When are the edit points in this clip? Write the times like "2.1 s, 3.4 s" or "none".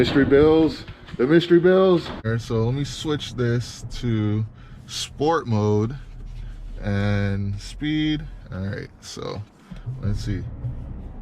2.2 s